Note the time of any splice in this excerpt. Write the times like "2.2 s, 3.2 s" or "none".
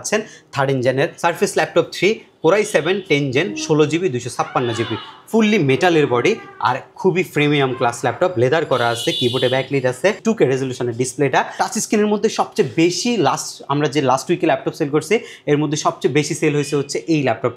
1.2 s, 10.2 s, 11.5 s